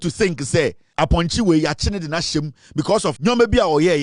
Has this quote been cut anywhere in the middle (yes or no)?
yes